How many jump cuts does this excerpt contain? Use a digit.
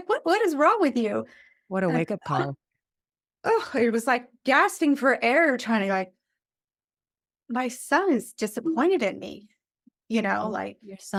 0